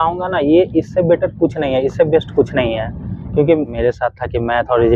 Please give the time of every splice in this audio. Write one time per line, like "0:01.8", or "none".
0:03.7